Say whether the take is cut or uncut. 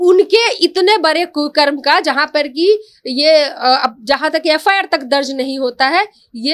uncut